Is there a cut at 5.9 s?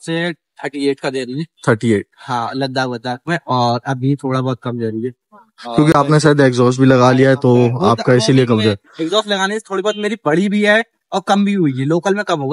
no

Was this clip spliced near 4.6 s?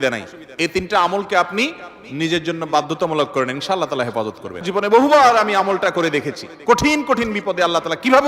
yes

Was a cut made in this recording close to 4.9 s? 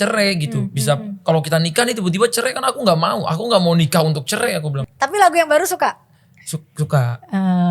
yes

